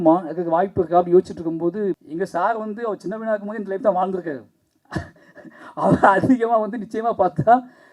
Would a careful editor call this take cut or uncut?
cut